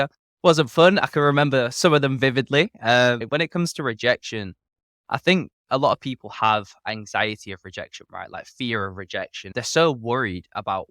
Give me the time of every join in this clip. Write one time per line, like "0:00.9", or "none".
0:03.2
0:09.5

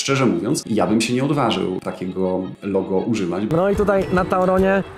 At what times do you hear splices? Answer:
0:03.5

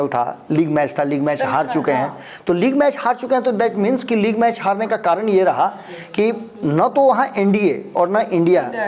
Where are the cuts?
none

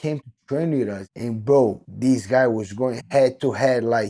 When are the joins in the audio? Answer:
0:01.1
0:01.9

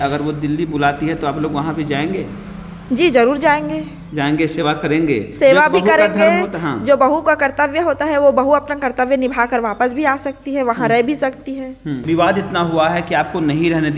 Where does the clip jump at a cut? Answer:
0:12.0

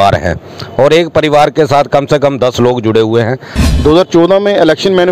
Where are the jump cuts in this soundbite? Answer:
0:03.6

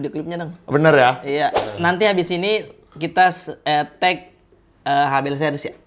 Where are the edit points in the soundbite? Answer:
0:01.6

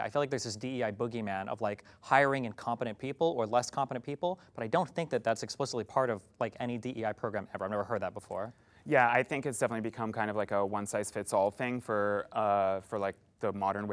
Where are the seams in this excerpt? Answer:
none

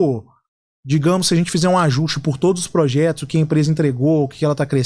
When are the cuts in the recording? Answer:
none

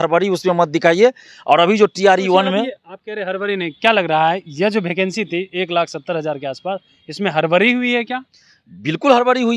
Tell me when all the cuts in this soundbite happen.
none

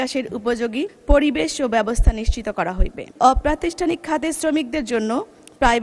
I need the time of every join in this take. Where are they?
0:01.0
0:03.1

